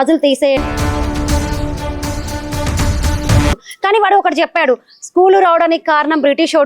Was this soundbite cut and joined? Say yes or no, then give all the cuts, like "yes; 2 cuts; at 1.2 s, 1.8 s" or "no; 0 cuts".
yes; 1 cut; at 3.6 s